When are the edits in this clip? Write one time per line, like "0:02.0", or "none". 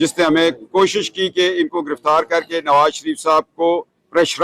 none